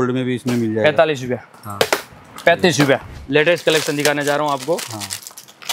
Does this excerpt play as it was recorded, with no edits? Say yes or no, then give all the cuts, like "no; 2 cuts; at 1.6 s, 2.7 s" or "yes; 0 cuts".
no; 1 cut; at 3.1 s